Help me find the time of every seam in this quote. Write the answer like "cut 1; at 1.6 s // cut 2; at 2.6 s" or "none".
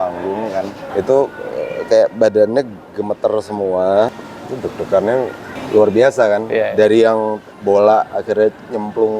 cut 1; at 0.8 s // cut 2; at 4.2 s // cut 3; at 5.5 s // cut 4; at 7.5 s